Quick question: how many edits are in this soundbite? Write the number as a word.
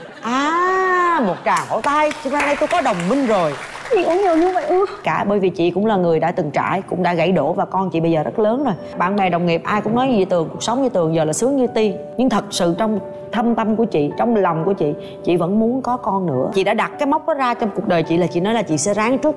two